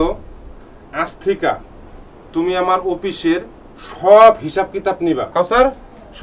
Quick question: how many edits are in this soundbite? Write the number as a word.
one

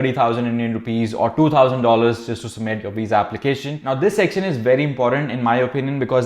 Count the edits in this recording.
one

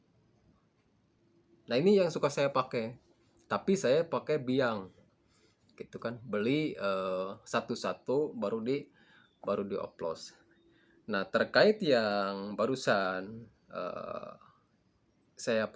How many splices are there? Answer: one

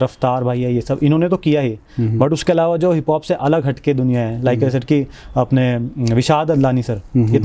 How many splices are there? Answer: zero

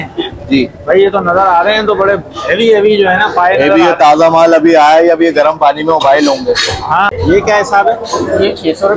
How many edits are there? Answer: one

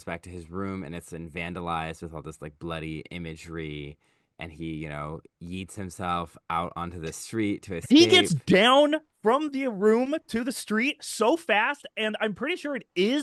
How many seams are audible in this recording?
zero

